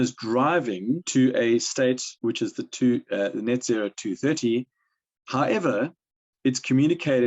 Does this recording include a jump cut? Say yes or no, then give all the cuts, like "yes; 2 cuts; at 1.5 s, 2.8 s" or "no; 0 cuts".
yes; 2 cuts; at 1.0 s, 2.1 s